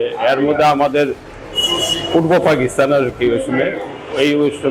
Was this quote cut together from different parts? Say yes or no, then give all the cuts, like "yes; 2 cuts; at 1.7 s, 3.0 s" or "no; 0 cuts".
no; 0 cuts